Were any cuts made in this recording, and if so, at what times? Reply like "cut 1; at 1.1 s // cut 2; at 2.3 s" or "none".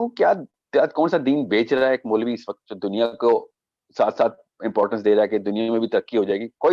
none